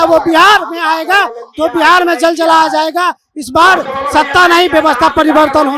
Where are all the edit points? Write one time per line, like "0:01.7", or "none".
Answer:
none